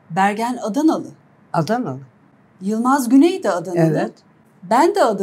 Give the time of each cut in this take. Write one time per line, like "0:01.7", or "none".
none